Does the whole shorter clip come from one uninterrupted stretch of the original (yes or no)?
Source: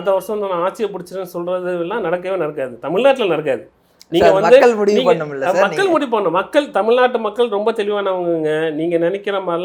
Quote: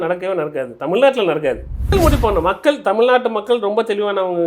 no